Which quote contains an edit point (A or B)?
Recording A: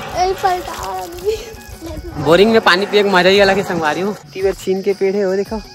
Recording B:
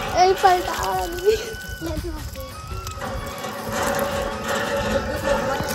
A